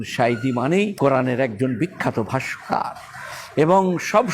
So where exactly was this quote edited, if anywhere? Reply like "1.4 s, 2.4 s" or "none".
0.9 s